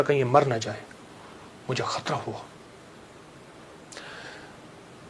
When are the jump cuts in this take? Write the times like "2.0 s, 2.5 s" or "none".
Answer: none

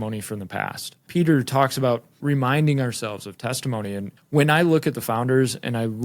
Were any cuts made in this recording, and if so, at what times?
1.0 s, 2.2 s, 4.1 s

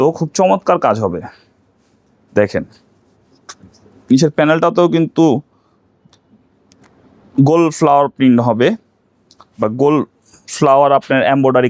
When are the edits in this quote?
none

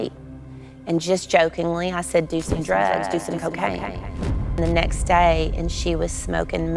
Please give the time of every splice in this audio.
4.6 s

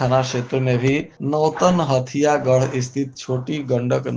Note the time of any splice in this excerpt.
1.1 s

